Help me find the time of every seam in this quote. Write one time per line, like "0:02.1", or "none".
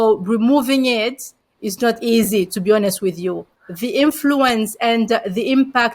0:03.5